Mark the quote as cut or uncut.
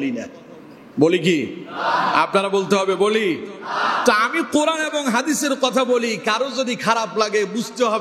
uncut